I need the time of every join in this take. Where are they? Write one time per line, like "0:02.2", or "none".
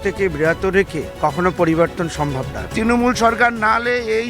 0:01.0
0:02.6